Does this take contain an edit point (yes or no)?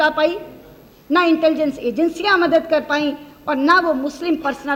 no